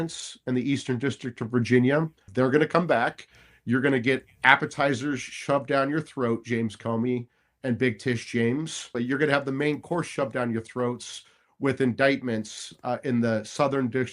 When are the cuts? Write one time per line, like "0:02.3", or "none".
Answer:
0:02.2
0:08.9